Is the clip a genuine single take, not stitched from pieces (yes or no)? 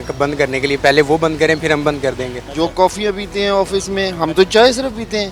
no